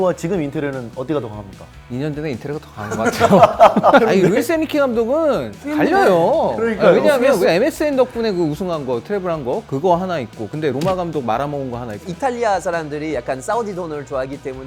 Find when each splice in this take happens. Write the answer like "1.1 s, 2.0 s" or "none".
4.0 s, 7.4 s, 12.0 s